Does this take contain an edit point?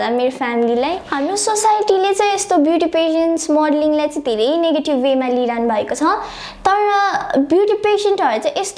yes; 1 cut; at 1.1 s

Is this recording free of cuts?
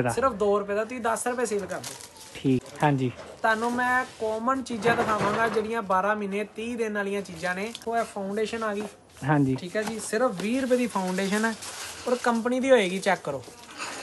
no; 2 cuts; at 2.6 s, 7.8 s

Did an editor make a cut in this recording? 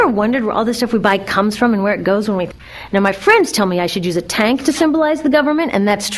no; 0 cuts

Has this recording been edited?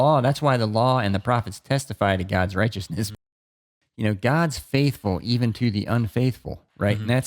yes; 1 cut; at 3.3 s

